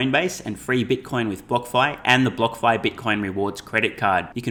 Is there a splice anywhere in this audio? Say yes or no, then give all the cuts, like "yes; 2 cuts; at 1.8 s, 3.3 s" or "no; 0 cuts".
no; 0 cuts